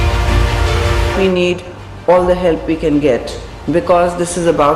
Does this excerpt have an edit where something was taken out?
yes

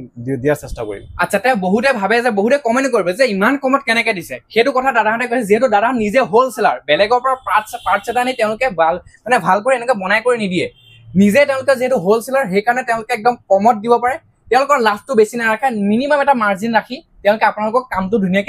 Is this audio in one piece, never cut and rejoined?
yes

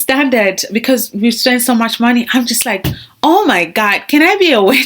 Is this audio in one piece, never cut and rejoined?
yes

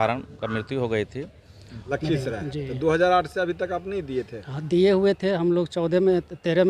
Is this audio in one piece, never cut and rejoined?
no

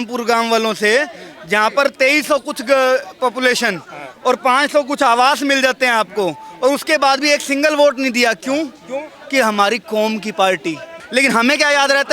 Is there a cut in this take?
yes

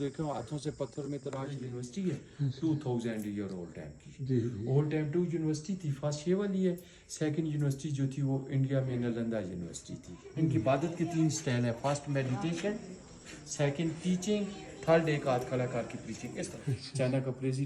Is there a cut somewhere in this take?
yes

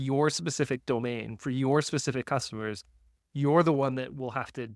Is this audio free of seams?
yes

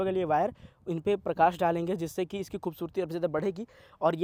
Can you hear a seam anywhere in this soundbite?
no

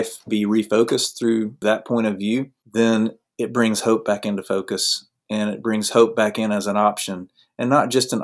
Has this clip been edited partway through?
yes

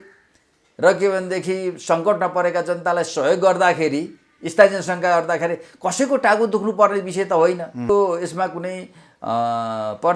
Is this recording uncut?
no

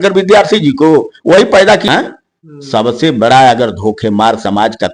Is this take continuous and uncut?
no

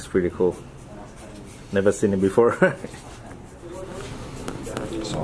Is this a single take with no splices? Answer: no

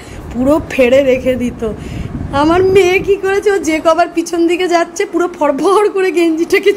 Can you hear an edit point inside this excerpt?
no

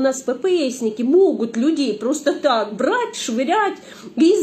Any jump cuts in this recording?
no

